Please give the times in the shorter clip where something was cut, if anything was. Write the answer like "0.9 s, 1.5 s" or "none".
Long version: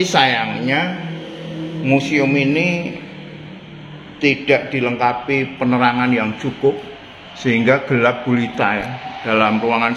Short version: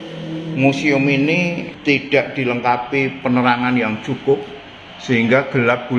1.7 s